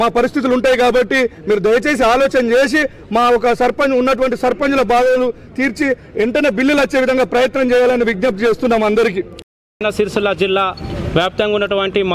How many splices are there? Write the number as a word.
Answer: zero